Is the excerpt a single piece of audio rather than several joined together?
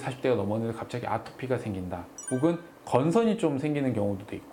yes; 0 cuts

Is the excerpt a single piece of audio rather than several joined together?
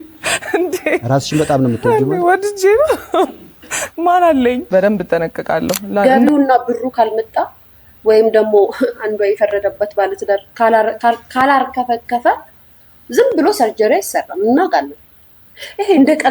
no; 1 cut; at 6.0 s

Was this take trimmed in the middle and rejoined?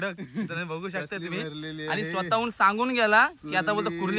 no; 0 cuts

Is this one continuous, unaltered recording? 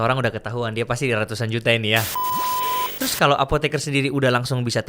no; 1 cut; at 2.5 s

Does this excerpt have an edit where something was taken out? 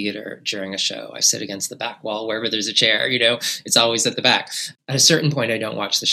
yes; 1 cut; at 4.6 s

